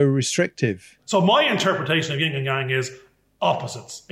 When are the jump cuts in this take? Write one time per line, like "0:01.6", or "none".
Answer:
0:00.9